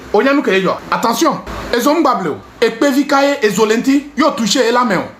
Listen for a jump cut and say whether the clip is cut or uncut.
cut